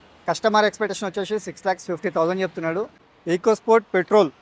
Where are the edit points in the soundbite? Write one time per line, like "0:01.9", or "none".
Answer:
0:03.0